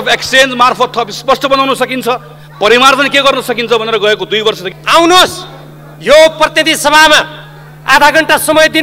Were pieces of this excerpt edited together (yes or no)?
yes